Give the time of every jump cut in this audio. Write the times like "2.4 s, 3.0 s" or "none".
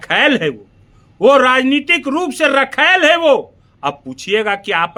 none